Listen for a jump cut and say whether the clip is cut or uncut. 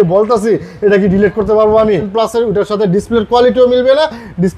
cut